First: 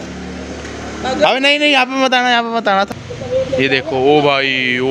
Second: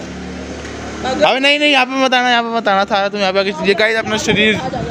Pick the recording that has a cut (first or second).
first